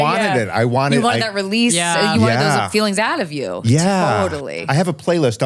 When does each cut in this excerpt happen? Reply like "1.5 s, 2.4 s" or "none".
4.5 s